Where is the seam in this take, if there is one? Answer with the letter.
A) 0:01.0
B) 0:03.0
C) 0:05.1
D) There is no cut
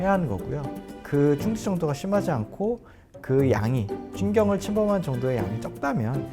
A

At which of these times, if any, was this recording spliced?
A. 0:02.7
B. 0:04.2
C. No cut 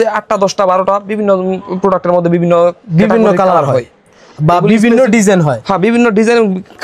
C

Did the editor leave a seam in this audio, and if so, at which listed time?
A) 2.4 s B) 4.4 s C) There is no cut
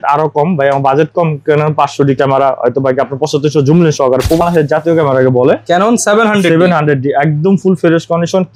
B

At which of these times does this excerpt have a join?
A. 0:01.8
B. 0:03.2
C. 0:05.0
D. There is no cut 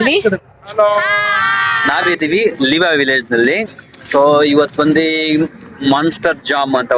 A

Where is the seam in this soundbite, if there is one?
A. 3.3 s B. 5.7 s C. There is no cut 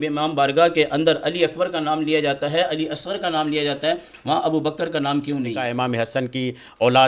B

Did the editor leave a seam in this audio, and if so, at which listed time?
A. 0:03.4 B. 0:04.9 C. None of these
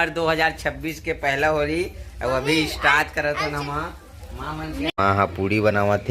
B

